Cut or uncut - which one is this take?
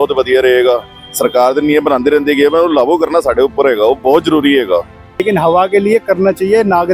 cut